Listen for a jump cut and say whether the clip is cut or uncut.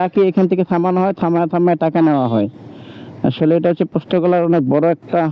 uncut